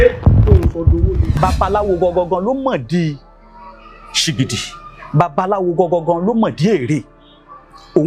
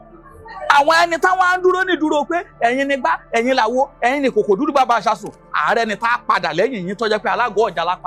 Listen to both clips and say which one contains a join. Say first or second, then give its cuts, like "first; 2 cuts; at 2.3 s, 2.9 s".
first; 1 cut; at 1.3 s